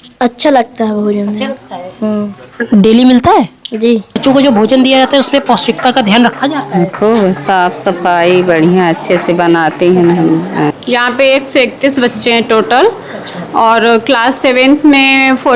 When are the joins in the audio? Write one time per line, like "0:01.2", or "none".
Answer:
0:04.2
0:10.8